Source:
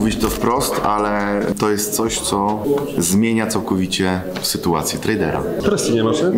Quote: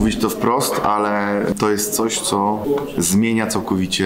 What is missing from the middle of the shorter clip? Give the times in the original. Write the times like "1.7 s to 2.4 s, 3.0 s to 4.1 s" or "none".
none

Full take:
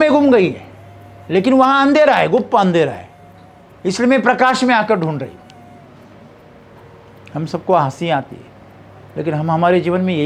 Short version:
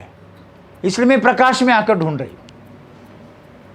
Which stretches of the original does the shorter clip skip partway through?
none

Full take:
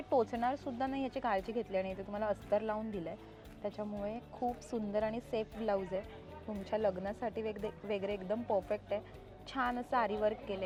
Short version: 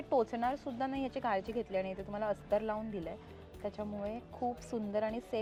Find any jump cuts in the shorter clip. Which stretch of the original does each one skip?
none

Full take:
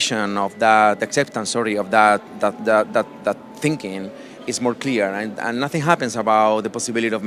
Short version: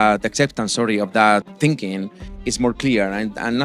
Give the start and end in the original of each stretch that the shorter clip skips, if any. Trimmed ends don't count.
2.3 s to 3.5 s

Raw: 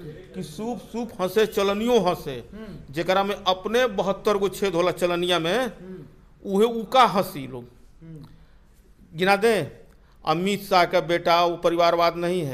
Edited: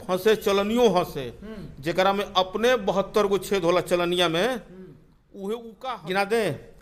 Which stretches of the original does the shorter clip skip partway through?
6.8 s to 8.8 s

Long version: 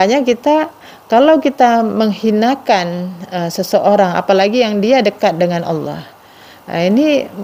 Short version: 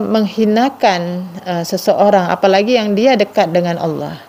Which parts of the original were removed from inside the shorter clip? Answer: none

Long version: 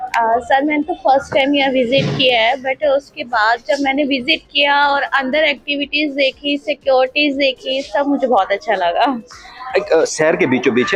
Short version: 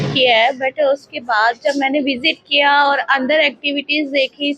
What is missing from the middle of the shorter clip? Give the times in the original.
none

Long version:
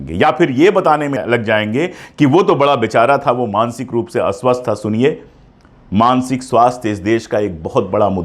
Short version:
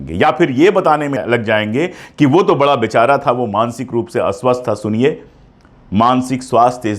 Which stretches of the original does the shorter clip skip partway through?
none

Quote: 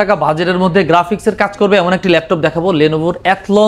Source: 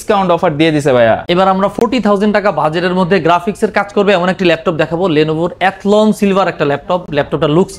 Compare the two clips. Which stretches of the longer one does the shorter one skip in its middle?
none

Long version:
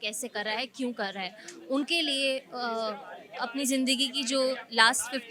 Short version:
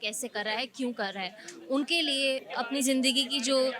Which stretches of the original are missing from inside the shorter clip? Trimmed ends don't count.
2.5 s to 3.3 s

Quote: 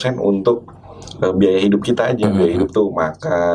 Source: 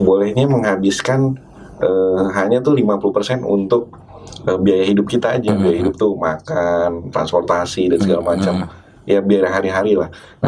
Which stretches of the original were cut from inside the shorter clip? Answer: none

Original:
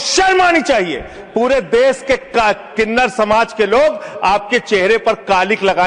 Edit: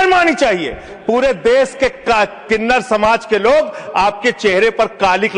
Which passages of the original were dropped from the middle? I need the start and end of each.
none

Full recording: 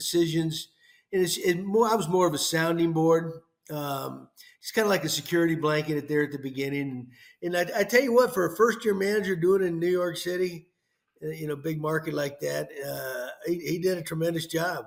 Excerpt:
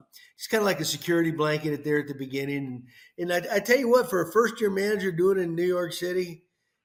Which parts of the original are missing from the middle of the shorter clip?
none

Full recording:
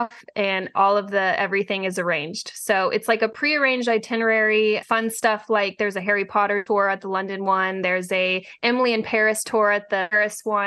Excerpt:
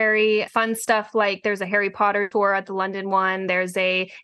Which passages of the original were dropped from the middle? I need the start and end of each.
none

